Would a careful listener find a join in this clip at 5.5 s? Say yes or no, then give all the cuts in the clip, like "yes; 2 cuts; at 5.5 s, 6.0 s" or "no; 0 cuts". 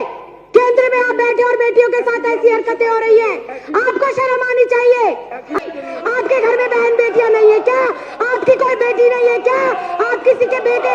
yes; 1 cut; at 5.5 s